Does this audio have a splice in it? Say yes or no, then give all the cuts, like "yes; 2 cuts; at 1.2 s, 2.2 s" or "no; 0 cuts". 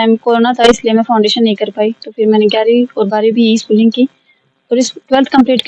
no; 0 cuts